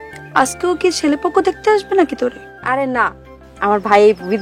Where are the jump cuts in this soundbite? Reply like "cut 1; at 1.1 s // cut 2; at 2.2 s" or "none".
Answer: none